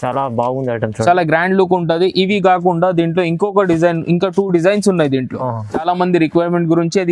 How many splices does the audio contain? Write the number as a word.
one